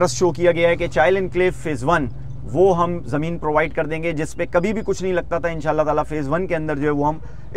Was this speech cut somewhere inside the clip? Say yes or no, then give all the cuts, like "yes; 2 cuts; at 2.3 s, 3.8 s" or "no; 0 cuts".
no; 0 cuts